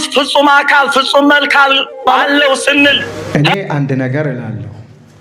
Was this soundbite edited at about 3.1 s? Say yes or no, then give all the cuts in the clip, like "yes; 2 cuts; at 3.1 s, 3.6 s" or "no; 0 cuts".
yes; 1 cut; at 3.1 s